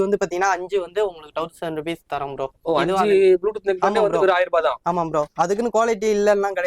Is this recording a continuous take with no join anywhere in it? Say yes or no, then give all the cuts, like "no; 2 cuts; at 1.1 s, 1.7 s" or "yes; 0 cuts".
yes; 0 cuts